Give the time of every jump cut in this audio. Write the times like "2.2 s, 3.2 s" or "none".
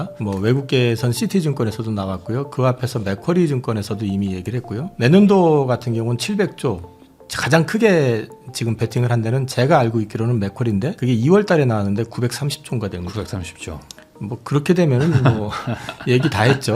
none